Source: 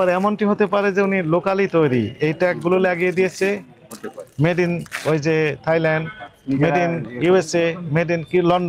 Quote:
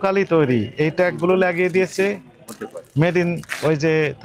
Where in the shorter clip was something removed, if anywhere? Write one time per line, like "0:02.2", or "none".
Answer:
none